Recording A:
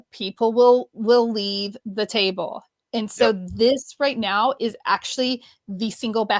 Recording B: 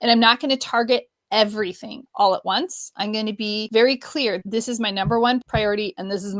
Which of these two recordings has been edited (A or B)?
B